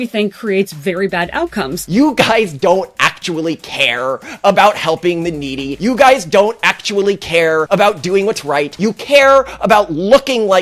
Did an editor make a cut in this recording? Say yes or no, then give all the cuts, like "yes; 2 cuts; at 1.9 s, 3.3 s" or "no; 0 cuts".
yes; 4 cuts; at 1.8 s, 5.7 s, 7.7 s, 8.7 s